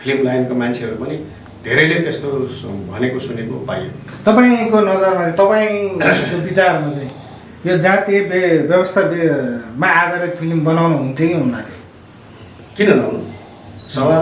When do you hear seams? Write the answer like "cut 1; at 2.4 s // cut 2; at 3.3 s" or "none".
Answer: none

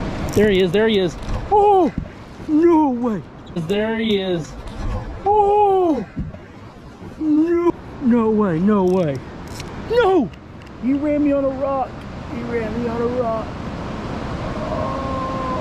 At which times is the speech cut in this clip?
none

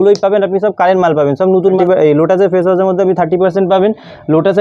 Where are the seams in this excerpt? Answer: cut 1; at 1.8 s

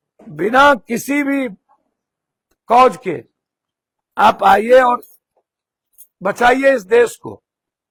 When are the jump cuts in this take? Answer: none

